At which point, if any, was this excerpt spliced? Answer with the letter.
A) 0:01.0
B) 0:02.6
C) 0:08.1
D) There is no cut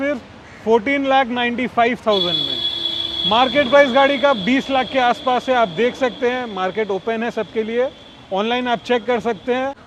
D